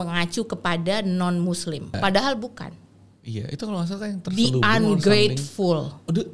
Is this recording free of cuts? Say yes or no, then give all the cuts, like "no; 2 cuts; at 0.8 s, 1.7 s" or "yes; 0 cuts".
no; 1 cut; at 2.0 s